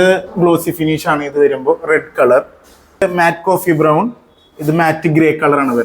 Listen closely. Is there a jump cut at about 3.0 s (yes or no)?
yes